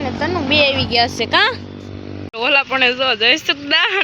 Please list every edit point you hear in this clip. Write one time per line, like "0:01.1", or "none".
0:02.2